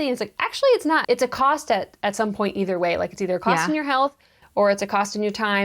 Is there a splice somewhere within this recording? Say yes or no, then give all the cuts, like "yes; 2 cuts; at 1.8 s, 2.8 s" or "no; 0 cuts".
yes; 1 cut; at 1.0 s